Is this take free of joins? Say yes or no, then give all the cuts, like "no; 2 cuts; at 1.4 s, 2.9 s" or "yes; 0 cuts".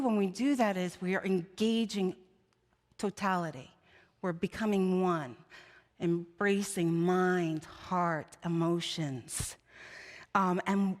yes; 0 cuts